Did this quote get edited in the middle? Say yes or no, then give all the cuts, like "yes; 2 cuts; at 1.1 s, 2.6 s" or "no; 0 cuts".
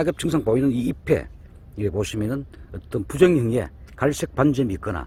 no; 0 cuts